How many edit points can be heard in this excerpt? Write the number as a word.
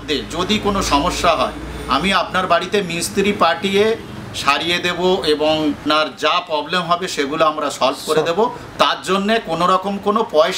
one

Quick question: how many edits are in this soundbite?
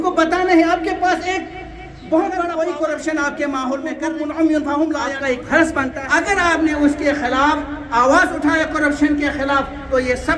four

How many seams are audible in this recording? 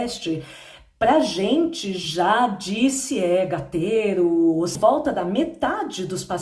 one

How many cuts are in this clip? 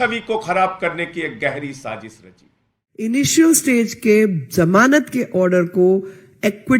one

